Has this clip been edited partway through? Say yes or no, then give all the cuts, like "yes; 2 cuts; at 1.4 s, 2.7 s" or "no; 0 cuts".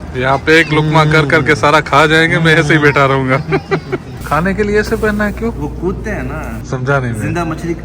yes; 2 cuts; at 4.1 s, 6.6 s